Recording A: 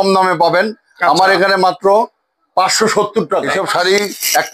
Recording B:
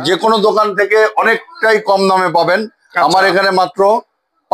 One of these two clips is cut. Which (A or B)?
A